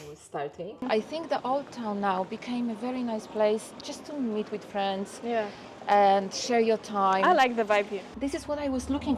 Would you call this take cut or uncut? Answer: cut